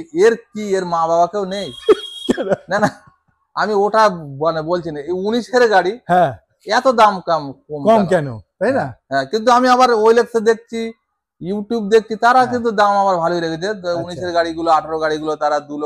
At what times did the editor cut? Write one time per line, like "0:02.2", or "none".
none